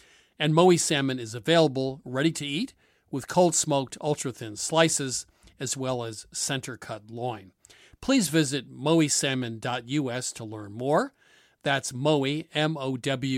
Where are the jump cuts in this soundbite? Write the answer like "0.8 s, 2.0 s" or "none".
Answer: none